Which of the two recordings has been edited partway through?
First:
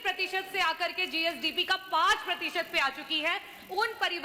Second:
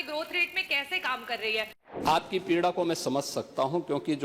second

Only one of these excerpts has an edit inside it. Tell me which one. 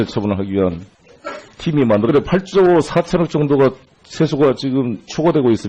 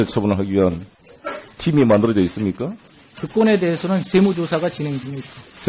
second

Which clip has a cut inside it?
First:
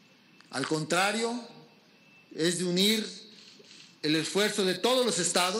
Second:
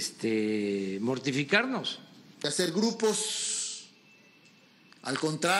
second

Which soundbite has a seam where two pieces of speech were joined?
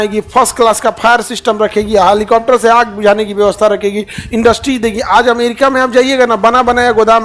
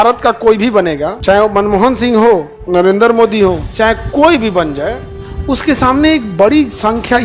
second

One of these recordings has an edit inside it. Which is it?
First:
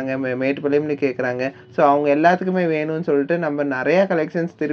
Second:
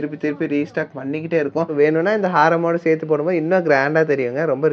second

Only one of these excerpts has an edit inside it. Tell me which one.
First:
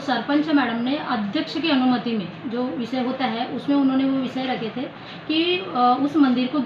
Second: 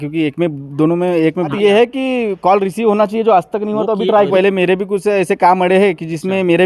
second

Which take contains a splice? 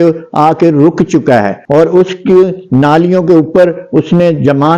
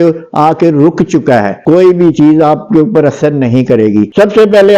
second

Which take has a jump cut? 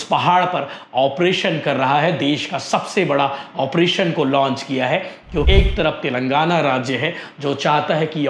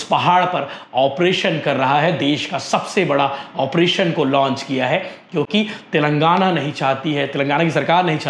first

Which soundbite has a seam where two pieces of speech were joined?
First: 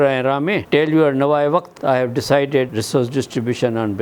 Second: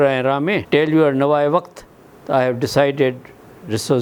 first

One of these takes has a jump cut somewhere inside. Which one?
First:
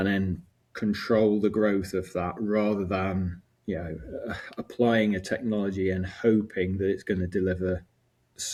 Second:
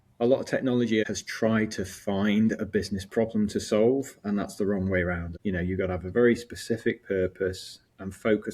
second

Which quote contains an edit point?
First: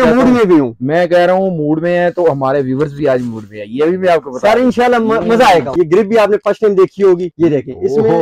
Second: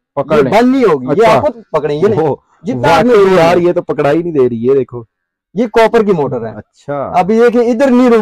first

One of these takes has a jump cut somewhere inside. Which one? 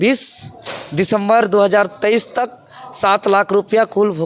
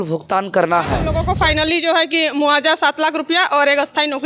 second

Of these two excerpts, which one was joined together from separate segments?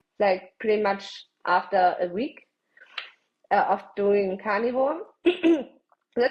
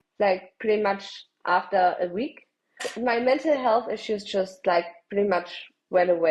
second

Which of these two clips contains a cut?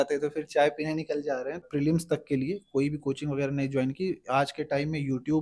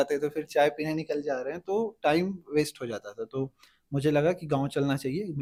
first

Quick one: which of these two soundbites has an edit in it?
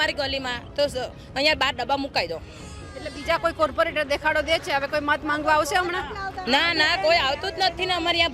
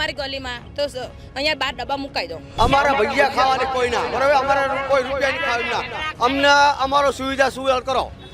second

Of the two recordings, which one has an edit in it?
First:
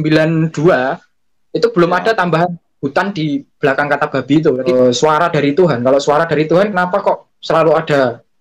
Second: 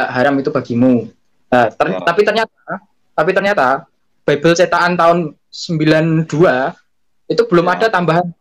first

